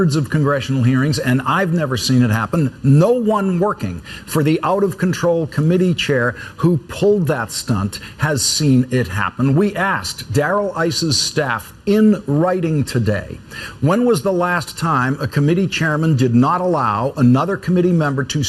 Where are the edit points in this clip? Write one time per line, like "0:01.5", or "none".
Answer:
none